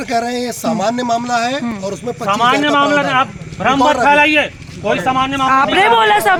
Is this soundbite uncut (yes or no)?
yes